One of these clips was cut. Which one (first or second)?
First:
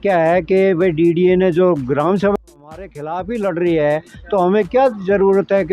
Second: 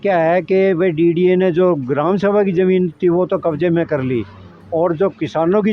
first